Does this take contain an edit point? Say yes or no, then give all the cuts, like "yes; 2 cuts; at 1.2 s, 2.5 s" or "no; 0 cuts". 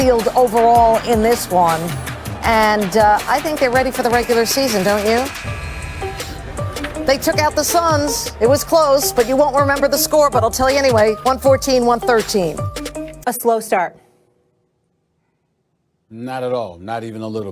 yes; 1 cut; at 13.1 s